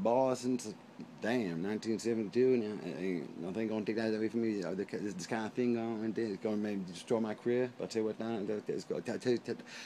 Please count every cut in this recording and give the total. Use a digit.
1